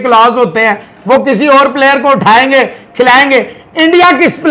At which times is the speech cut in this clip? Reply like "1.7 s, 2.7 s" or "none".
none